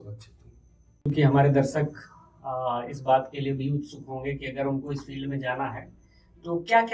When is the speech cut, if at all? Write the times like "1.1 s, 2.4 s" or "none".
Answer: 1.1 s